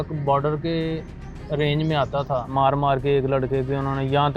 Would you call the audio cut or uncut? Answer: cut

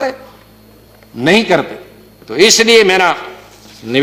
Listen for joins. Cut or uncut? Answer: uncut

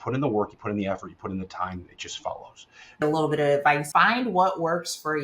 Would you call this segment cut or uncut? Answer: cut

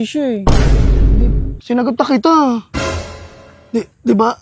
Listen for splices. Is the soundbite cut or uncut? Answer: uncut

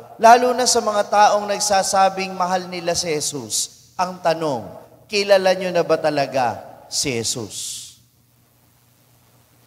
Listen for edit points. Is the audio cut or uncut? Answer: uncut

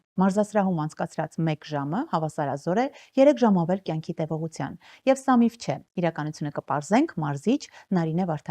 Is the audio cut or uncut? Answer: uncut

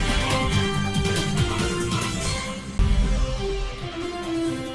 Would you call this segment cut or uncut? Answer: uncut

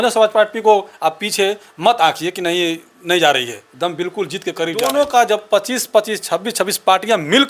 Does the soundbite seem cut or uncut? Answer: cut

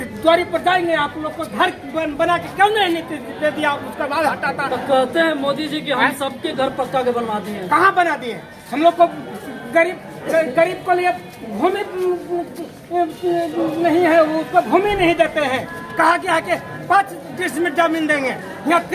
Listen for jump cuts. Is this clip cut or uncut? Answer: uncut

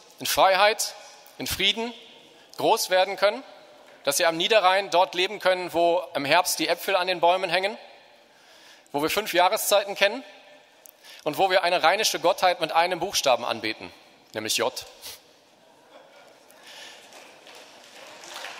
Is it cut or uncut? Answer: uncut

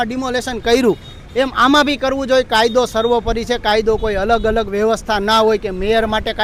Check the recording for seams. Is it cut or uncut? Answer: uncut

